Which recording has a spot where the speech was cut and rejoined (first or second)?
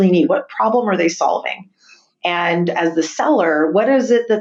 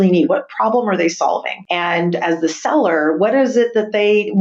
second